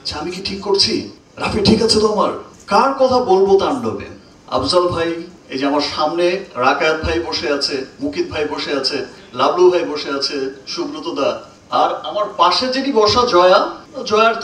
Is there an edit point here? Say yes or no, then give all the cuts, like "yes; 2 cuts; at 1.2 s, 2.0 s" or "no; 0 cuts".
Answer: no; 0 cuts